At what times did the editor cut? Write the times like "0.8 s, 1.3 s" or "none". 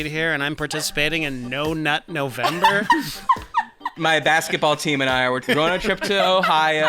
3.9 s, 5.4 s